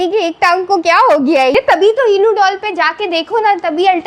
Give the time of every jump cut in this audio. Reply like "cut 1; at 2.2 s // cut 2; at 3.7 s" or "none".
cut 1; at 1.5 s